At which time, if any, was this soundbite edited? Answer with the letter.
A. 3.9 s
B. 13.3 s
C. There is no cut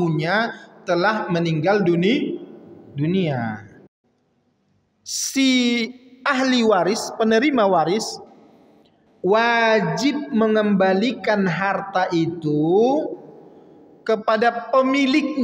A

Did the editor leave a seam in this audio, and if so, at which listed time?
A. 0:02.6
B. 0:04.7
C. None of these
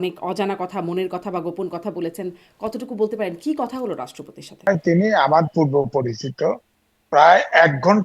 B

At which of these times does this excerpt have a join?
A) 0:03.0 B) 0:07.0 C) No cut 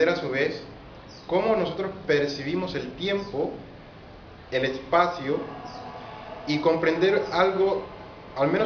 A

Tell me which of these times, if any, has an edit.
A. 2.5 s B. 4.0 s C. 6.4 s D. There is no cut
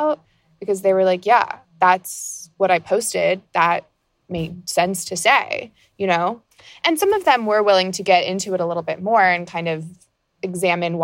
C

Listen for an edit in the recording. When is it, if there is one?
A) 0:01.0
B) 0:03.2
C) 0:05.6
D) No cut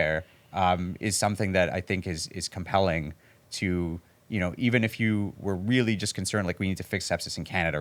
D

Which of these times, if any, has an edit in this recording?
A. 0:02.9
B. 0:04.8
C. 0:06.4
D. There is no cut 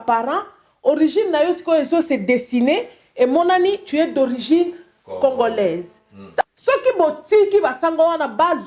C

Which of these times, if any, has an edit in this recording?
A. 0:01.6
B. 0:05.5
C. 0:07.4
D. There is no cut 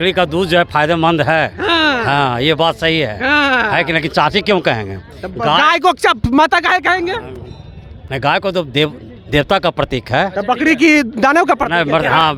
D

